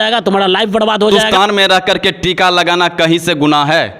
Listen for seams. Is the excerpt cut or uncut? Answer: cut